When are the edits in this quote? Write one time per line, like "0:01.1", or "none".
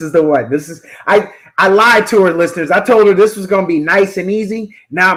none